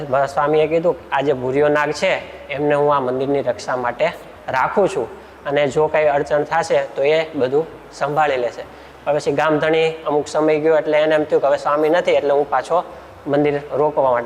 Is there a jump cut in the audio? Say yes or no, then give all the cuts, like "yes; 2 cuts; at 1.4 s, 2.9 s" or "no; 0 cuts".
no; 0 cuts